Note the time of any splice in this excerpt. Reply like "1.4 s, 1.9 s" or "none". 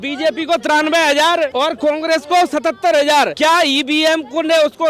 1.5 s, 3.3 s